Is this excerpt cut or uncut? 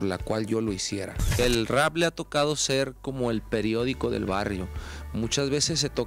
cut